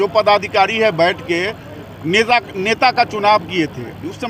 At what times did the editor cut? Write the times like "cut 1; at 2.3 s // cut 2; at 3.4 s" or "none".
none